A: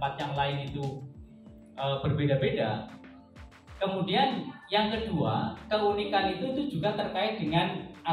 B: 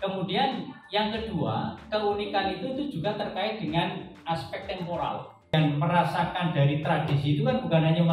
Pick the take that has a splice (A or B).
B